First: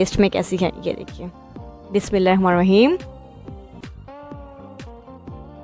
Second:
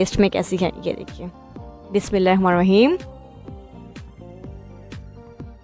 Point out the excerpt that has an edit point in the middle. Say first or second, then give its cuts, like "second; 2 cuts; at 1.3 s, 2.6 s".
first; 1 cut; at 3.8 s